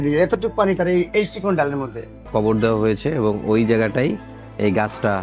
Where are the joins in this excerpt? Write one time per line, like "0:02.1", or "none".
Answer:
0:02.3